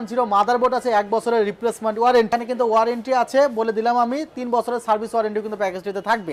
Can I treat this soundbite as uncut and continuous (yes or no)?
no